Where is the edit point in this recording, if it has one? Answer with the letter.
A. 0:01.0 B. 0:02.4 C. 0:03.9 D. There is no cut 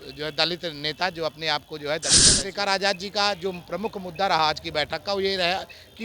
B